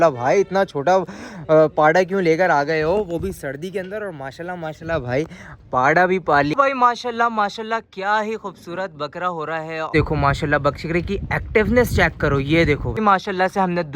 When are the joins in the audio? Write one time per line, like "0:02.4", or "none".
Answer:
0:06.5
0:09.9
0:12.9